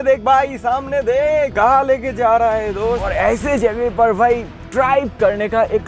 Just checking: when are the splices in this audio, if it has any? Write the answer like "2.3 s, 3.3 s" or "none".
1.5 s, 3.1 s